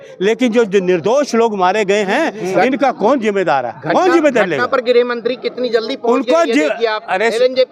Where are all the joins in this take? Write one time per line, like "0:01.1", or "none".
none